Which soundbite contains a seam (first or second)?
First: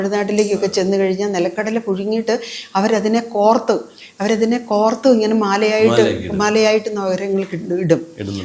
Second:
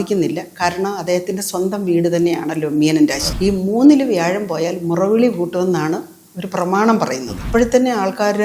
second